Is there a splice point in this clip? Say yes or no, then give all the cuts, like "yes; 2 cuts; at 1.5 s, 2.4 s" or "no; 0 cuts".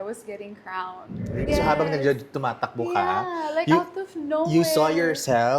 yes; 1 cut; at 1.5 s